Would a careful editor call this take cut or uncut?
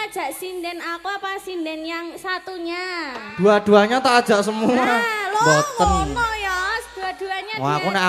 uncut